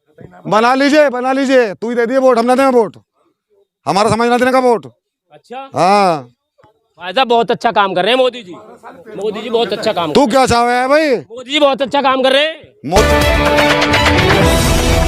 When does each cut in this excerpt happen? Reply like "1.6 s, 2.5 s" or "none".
13.0 s